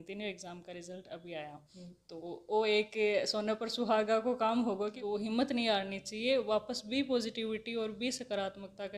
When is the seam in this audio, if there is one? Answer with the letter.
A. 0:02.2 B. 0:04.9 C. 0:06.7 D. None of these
B